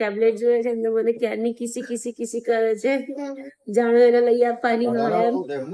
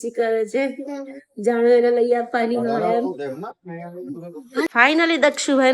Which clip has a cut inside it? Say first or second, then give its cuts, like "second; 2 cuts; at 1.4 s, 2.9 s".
second; 1 cut; at 4.7 s